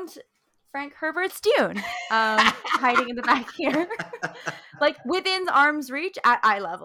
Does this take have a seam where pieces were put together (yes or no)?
no